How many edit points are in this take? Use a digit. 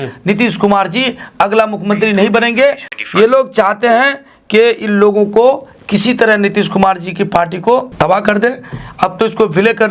2